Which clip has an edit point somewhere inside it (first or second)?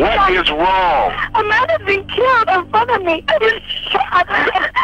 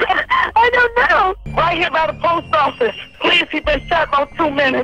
second